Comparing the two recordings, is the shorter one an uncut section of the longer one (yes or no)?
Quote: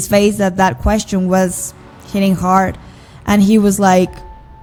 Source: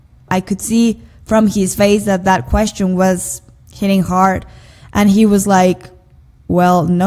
yes